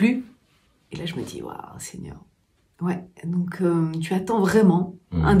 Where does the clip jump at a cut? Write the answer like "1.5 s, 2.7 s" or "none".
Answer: none